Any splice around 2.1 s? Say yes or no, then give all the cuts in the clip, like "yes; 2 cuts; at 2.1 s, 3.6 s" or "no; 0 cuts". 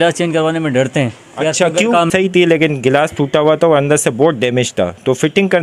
yes; 1 cut; at 2.1 s